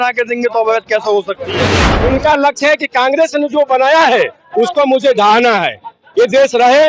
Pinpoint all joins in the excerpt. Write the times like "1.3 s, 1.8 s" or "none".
1.8 s